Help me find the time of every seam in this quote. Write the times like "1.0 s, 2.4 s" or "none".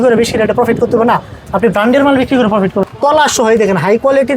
2.9 s